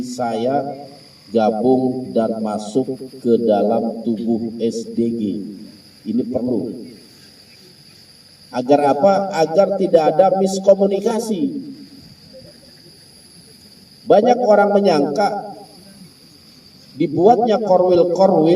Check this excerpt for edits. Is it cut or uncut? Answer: uncut